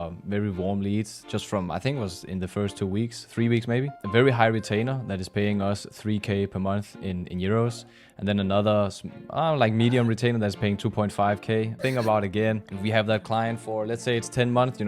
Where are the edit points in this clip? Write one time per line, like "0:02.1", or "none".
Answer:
0:04.0
0:11.8
0:12.7